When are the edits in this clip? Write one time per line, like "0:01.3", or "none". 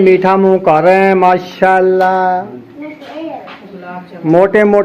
0:02.5